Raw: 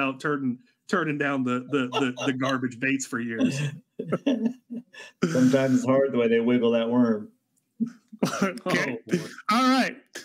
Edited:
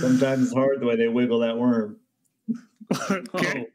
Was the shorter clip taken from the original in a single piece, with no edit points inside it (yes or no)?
yes